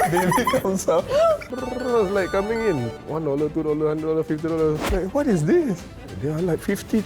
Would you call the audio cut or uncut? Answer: cut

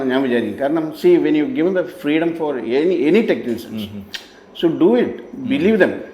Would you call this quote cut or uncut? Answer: uncut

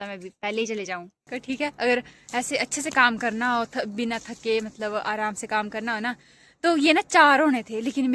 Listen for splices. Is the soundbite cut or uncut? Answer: cut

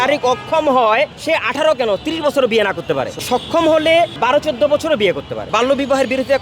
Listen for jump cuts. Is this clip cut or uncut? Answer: cut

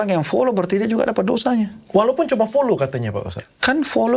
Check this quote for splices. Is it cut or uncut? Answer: uncut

